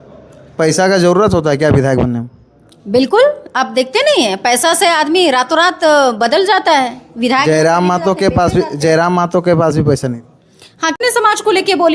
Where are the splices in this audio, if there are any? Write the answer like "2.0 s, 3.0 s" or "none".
11.0 s

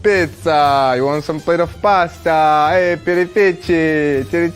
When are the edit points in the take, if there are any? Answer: none

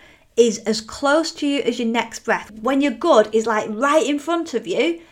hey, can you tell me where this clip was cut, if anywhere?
2.5 s

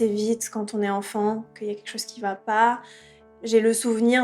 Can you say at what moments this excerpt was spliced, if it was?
3.2 s

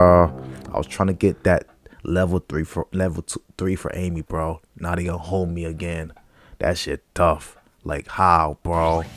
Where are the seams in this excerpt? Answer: none

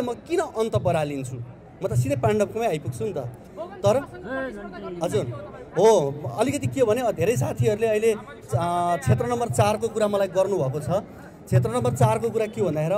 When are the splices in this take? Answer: none

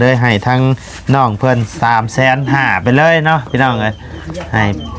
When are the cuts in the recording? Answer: none

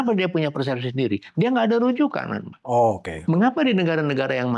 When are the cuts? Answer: 3.1 s

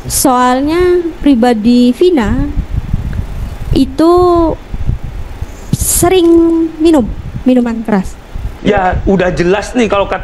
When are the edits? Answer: 8.5 s

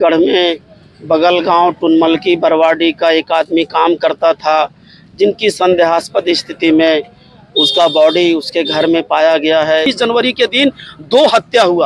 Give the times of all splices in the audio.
9.9 s

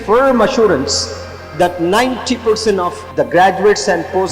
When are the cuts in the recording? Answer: 3.0 s

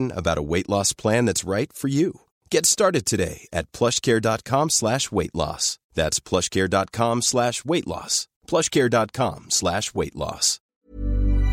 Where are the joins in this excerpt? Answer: 10.6 s

